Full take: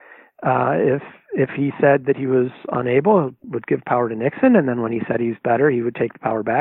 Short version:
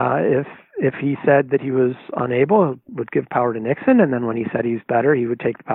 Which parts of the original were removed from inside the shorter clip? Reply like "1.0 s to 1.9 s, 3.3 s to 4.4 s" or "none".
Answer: none